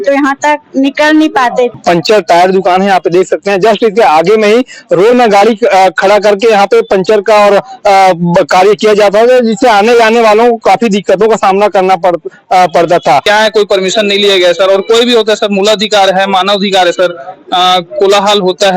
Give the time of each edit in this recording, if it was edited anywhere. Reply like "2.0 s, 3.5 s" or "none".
1.8 s, 13.2 s

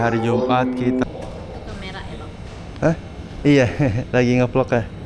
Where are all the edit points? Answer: 1.0 s

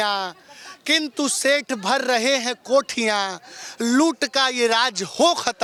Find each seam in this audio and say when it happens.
none

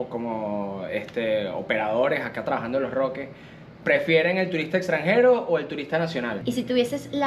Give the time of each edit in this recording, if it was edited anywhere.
6.4 s

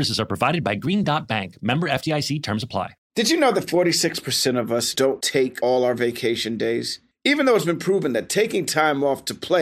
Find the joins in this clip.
3.0 s

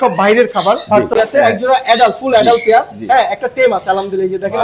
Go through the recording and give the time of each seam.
1.1 s

